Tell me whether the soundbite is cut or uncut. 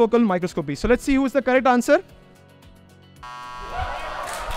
uncut